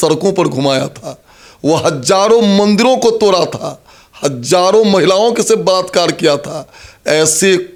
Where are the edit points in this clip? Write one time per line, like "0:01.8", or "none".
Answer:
none